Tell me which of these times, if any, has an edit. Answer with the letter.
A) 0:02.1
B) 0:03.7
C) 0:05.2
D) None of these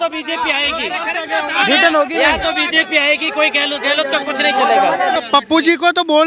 C